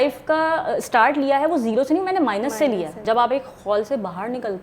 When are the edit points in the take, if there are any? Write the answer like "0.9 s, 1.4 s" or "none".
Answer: 3.0 s